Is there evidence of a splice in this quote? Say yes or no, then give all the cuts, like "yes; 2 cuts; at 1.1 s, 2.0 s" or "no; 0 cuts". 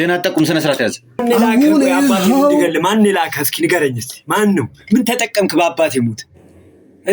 yes; 1 cut; at 1.2 s